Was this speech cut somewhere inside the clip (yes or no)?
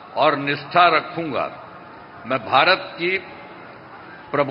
no